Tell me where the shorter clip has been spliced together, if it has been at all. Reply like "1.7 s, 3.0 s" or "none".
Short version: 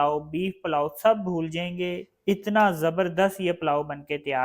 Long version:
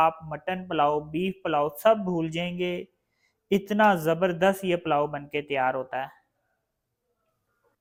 2.1 s